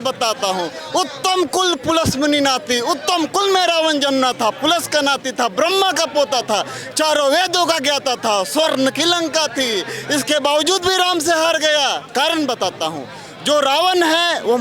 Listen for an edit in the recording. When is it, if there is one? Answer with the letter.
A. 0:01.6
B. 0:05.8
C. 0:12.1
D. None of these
D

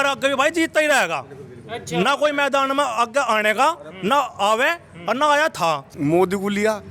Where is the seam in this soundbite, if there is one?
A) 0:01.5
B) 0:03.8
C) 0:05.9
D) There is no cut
C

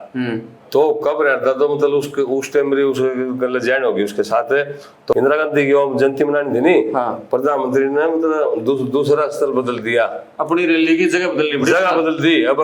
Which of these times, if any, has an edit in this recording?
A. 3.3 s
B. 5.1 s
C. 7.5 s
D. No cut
B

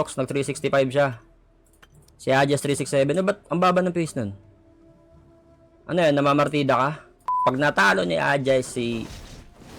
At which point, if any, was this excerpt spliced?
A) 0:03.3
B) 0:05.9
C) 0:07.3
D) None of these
C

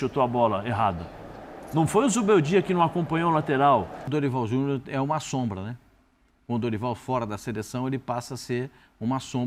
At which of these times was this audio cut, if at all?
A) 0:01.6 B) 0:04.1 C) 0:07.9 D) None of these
B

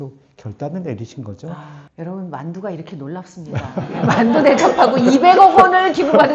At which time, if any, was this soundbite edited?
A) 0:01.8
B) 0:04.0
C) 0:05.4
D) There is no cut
A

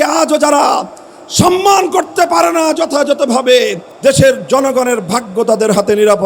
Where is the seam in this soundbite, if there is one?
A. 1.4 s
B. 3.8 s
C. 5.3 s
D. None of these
B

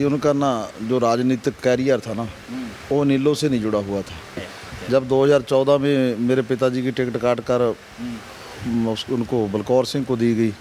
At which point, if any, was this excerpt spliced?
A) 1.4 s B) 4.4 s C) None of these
B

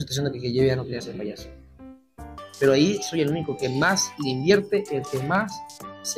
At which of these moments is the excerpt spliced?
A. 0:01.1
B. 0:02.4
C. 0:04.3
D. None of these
B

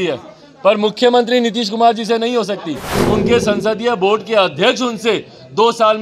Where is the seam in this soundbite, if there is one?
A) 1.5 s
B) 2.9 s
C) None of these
B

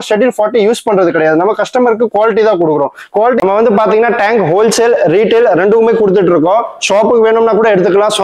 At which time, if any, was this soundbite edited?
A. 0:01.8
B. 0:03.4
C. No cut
B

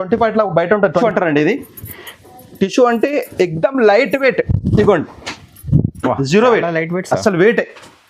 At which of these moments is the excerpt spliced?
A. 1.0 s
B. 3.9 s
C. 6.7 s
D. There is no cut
A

